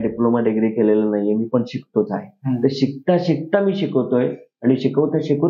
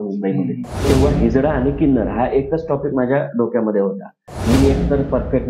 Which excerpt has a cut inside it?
second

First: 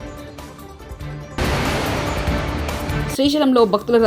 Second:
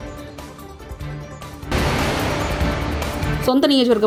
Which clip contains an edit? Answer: first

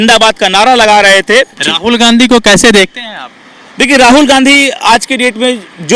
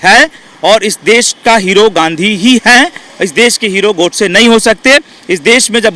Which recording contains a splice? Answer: first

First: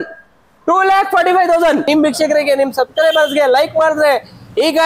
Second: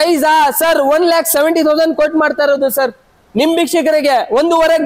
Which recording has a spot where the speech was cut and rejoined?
first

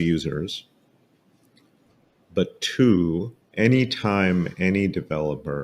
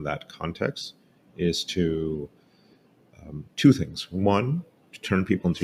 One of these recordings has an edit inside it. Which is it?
first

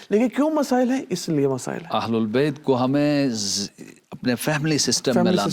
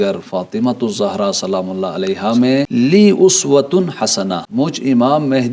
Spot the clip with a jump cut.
second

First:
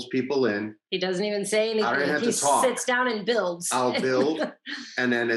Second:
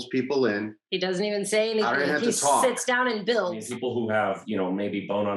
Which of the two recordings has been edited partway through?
second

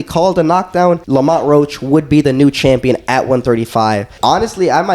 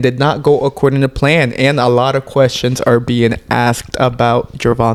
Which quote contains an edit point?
first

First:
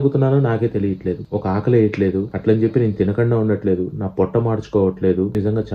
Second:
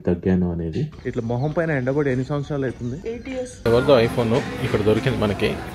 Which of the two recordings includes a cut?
second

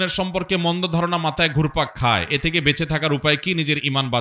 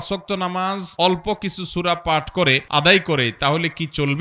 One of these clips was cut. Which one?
second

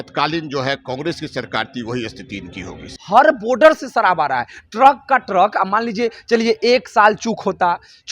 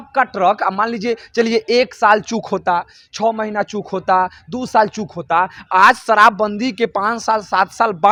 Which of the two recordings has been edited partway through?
first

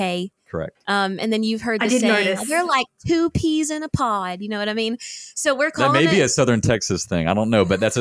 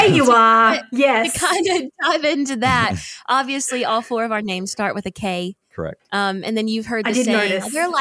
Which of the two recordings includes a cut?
second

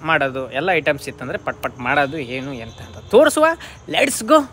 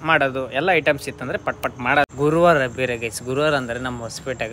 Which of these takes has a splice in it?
second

